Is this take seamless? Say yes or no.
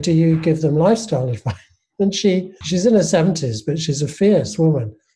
no